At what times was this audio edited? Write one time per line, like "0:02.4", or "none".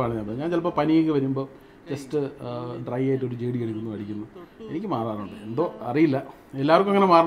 none